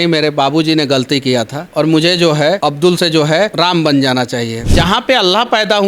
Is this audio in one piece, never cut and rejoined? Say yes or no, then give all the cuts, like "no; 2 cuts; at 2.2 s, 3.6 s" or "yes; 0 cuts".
no; 4 cuts; at 1.6 s, 2.6 s, 3.5 s, 4.6 s